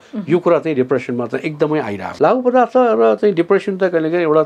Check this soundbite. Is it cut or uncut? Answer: cut